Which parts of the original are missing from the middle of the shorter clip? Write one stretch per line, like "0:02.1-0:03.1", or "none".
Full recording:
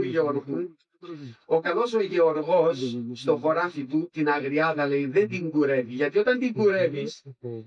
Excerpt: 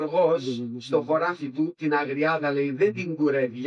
none